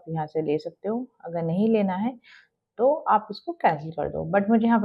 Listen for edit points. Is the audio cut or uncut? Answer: uncut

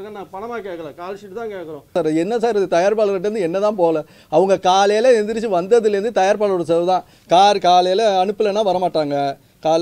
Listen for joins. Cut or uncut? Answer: cut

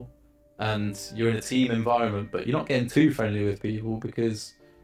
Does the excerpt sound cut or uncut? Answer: uncut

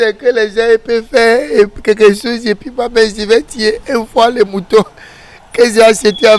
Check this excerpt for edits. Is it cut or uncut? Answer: uncut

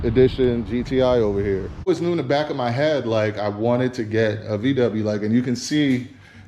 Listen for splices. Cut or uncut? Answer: cut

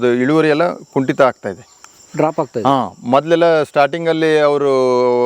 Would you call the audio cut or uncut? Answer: uncut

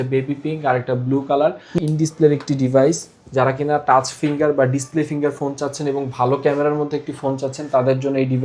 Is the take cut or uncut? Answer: cut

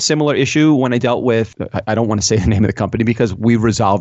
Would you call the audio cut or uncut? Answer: cut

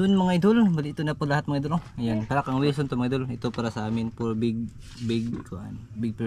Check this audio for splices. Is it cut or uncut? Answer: uncut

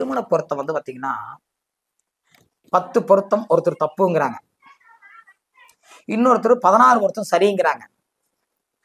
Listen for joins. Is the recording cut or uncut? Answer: uncut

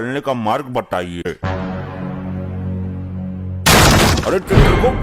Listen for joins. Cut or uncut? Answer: cut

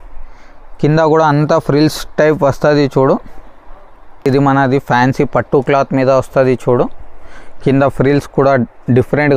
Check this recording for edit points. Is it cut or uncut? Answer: cut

